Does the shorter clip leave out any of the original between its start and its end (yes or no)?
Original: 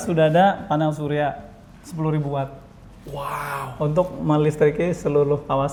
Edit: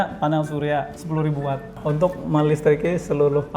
yes